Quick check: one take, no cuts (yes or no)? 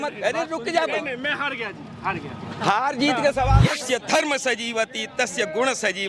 no